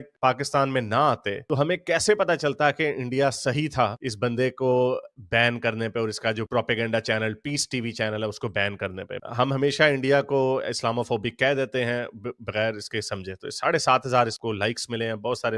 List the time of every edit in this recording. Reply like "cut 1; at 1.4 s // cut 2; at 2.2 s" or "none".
none